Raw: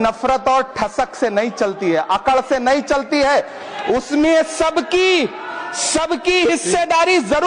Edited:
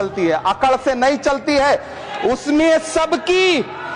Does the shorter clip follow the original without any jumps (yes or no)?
yes